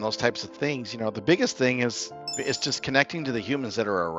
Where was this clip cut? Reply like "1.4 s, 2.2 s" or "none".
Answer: none